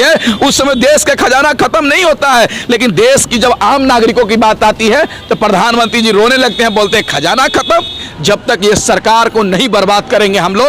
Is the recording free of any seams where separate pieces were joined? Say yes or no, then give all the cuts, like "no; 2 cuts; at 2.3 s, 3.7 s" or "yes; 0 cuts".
no; 1 cut; at 8.1 s